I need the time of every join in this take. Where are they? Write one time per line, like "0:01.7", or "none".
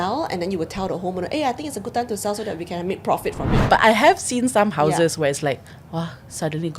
0:03.6